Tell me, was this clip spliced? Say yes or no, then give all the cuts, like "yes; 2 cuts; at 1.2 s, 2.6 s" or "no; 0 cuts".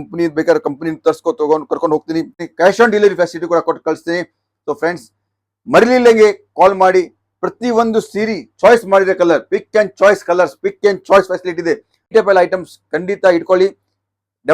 yes; 2 cuts; at 2.4 s, 11.9 s